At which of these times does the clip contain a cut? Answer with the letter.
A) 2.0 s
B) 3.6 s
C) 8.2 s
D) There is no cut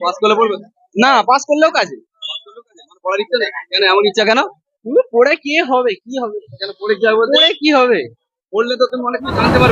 D